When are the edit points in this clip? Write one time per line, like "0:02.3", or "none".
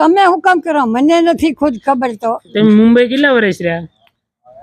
0:02.5